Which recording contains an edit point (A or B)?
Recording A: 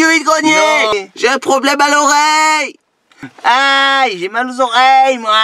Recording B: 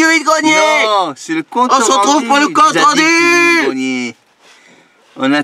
A